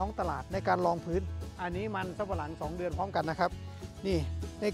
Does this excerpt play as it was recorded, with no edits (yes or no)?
no